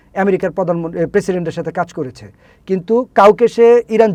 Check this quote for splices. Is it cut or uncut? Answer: uncut